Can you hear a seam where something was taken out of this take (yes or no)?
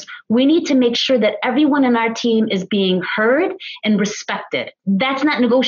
yes